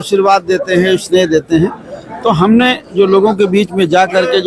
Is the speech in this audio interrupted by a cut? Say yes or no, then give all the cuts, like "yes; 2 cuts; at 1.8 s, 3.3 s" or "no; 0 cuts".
no; 0 cuts